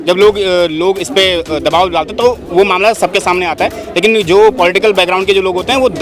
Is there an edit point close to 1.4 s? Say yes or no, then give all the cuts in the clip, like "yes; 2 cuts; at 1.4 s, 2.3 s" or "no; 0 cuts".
no; 0 cuts